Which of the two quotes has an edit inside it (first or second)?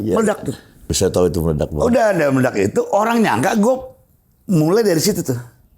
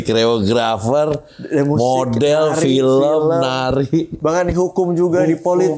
first